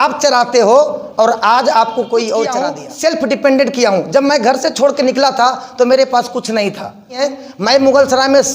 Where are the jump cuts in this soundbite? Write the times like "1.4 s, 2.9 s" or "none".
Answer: 2.8 s, 7.2 s